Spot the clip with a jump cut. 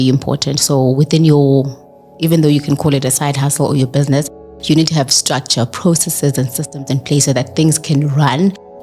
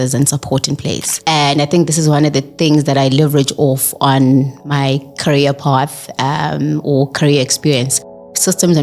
second; 1 cut; at 1.1 s

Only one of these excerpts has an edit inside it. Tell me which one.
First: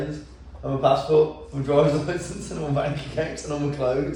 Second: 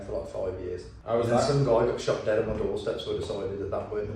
second; 1 cut; at 0.9 s

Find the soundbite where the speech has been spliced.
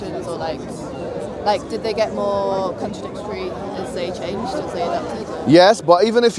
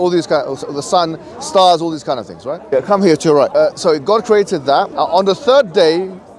second; 3 cuts; at 2.6 s, 3.7 s, 4.9 s

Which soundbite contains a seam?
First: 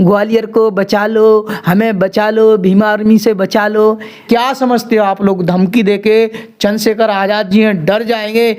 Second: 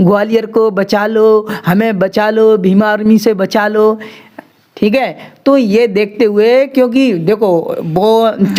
first; 1 cut; at 4.2 s

